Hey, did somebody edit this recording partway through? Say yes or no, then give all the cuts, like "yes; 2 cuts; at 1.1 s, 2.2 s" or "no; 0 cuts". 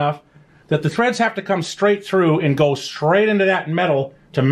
no; 0 cuts